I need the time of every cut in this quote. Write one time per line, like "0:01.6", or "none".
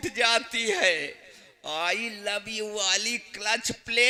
none